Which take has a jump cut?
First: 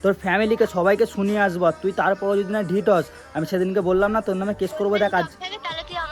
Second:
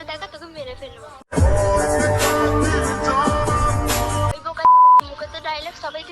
second; 1 cut; at 4.3 s

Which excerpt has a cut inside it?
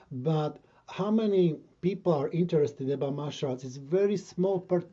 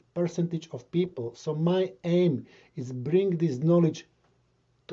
first; 1 cut; at 1.7 s

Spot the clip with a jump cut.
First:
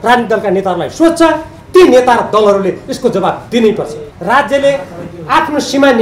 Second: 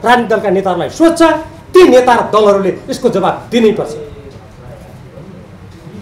first; 1 cut; at 4.0 s

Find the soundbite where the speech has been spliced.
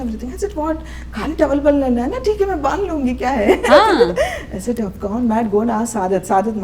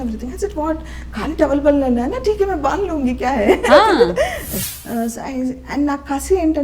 second; 1 cut; at 4.5 s

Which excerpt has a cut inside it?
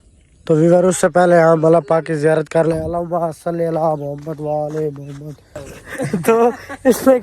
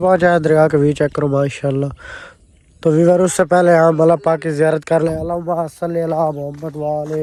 first; 1 cut; at 5.9 s

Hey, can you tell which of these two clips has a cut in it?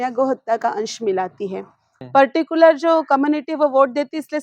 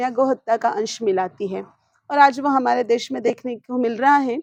first; 1 cut; at 2.0 s

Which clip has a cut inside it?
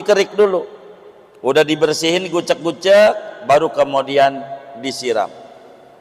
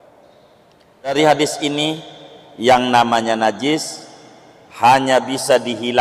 second; 1 cut; at 1.1 s

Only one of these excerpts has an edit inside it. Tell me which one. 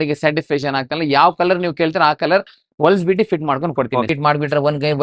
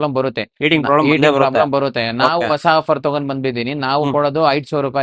first; 1 cut; at 4.1 s

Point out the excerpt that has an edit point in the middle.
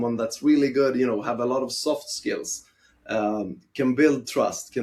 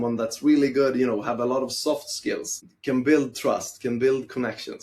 second; 1 cut; at 2.7 s

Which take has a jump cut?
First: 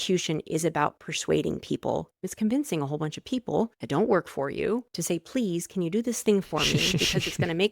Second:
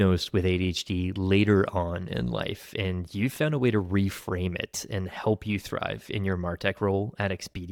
first; 3 cuts; at 2.2 s, 3.8 s, 4.9 s

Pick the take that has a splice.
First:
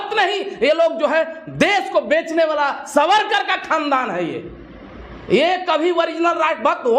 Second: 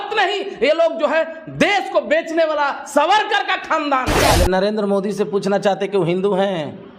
second; 1 cut; at 4.1 s

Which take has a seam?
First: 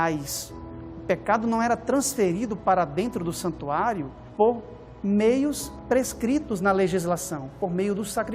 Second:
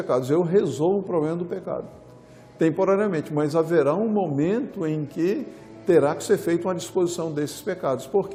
first; 2 cuts; at 4.2 s, 5.7 s

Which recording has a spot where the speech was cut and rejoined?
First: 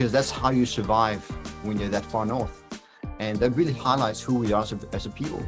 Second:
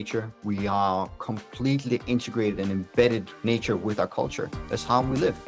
second; 1 cut; at 3.3 s

